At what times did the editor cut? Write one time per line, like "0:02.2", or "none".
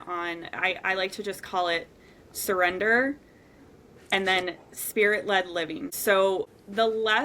0:05.9
0:06.5